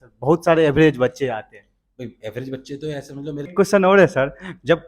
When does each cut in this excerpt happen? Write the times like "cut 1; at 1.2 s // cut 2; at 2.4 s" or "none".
cut 1; at 3.5 s